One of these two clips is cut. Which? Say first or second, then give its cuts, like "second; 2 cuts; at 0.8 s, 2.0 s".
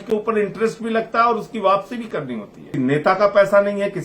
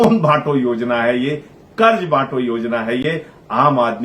first; 1 cut; at 2.7 s